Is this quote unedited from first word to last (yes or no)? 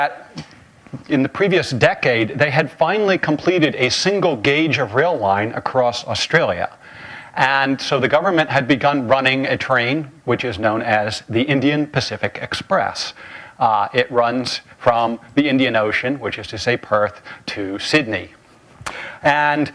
yes